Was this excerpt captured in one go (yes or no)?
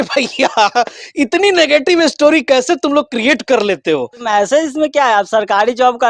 no